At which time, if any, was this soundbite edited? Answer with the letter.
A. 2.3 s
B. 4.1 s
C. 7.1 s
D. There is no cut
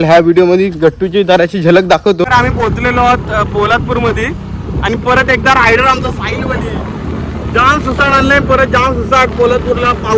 A